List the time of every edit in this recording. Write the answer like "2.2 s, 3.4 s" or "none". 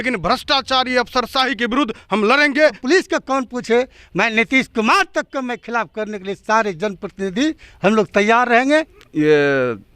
2.8 s, 8.9 s